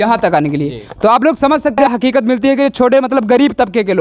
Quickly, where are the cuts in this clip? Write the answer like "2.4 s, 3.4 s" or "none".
1.8 s